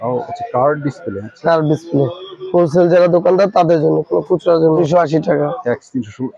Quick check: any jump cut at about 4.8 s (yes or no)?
yes